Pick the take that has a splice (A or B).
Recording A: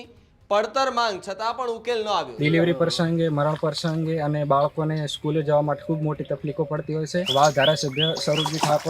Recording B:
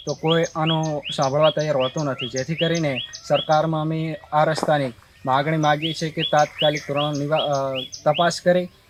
A